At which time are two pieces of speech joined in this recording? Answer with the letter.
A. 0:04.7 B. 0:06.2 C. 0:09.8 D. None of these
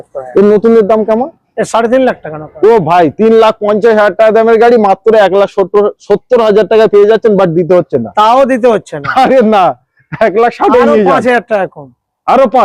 D